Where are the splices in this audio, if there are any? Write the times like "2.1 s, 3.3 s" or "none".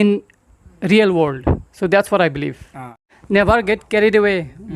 3.1 s